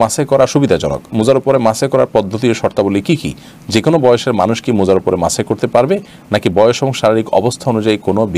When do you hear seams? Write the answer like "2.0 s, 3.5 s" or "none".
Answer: none